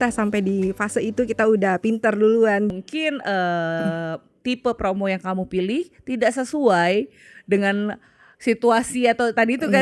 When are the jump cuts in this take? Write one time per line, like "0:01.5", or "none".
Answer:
0:02.7